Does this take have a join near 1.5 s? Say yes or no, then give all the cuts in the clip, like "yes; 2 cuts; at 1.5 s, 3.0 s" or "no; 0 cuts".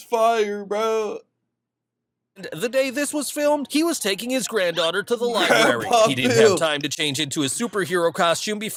no; 0 cuts